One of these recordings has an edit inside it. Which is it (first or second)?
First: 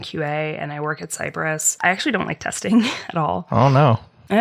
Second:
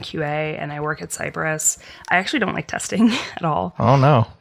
first